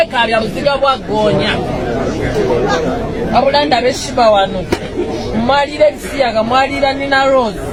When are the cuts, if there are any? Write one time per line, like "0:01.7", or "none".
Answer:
none